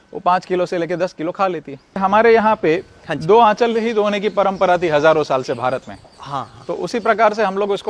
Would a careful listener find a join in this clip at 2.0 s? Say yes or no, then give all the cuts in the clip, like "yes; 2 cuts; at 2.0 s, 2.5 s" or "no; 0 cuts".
yes; 1 cut; at 2.0 s